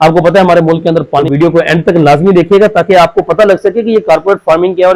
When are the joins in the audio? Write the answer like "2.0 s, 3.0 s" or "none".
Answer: 1.3 s